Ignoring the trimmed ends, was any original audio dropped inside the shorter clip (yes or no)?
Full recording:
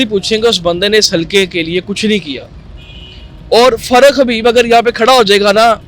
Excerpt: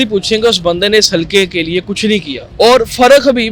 yes